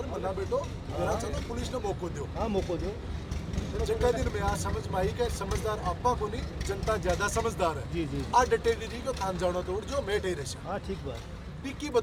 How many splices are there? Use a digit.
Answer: 0